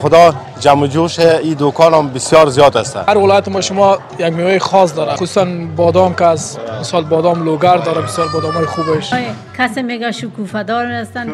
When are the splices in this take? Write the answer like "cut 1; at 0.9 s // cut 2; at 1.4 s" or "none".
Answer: cut 1; at 3.1 s // cut 2; at 5.2 s // cut 3; at 9.1 s